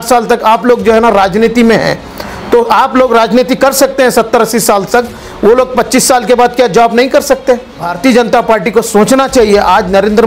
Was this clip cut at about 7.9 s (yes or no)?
yes